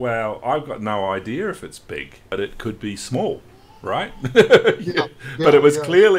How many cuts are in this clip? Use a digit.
1